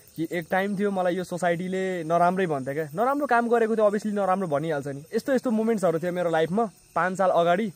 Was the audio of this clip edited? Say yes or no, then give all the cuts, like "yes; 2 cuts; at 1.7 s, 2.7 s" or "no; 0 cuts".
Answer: yes; 1 cut; at 5.2 s